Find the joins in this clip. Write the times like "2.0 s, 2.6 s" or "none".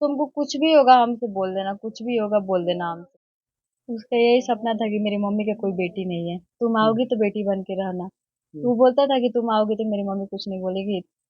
3.1 s